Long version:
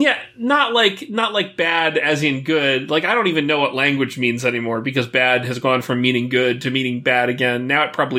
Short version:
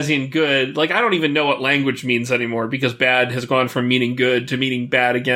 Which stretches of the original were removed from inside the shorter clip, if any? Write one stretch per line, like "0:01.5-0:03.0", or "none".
none